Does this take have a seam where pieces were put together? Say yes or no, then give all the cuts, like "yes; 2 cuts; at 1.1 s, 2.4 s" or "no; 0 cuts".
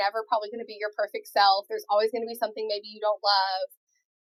no; 0 cuts